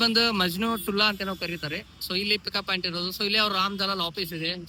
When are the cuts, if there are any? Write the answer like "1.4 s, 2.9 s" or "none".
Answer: none